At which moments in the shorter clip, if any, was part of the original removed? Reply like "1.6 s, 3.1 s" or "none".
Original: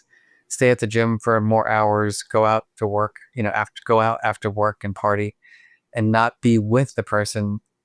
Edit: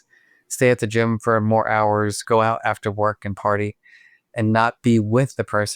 2.2 s